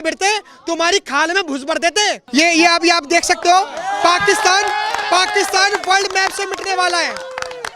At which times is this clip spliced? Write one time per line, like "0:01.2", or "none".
0:02.2